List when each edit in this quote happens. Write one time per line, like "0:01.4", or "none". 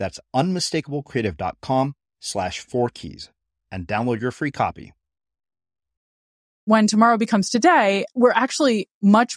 0:06.7
0:08.1